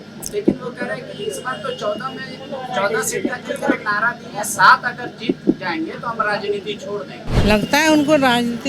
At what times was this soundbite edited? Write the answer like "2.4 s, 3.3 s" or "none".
7.3 s